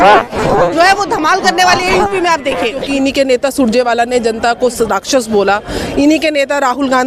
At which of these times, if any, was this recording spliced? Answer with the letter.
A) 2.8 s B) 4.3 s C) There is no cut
A